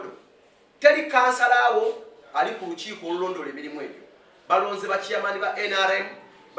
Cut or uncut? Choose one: uncut